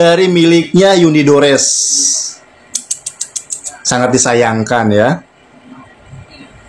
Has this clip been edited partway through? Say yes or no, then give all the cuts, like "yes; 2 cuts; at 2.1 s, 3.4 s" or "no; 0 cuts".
no; 0 cuts